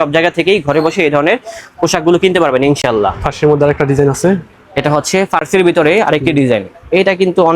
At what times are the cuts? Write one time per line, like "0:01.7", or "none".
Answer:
none